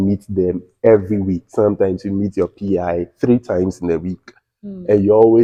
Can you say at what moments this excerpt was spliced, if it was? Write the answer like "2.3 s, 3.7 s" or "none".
none